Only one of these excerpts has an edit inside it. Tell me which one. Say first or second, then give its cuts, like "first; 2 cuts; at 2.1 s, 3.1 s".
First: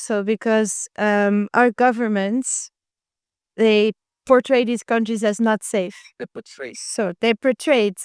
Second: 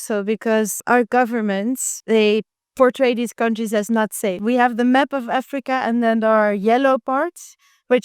second; 3 cuts; at 0.8 s, 1.9 s, 4.4 s